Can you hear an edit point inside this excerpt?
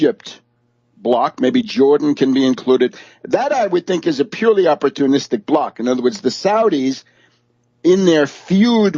no; 0 cuts

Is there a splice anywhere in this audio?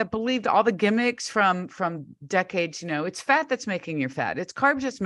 no; 0 cuts

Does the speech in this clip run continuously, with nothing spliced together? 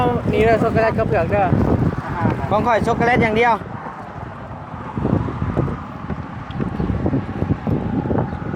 yes; 0 cuts

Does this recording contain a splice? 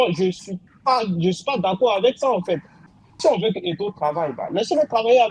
yes; 1 cut; at 3.2 s

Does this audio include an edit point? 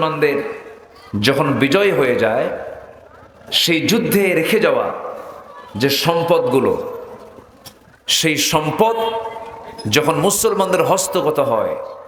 no; 0 cuts

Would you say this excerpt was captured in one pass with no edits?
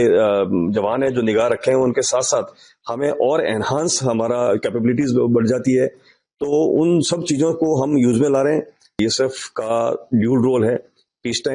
no; 1 cut; at 9.0 s

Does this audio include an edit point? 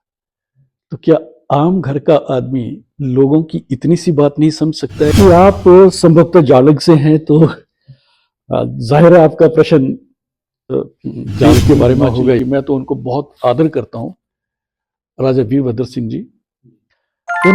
yes; 2 cuts; at 5.1 s, 12.4 s

